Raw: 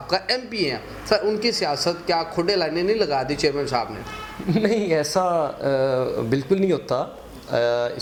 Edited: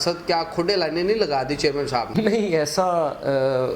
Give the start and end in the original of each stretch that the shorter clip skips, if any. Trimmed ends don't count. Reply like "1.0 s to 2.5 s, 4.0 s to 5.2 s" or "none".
3.9 s to 4.5 s